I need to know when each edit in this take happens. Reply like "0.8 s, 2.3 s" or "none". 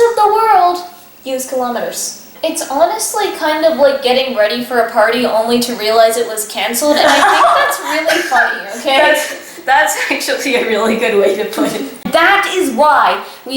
2.2 s, 12.0 s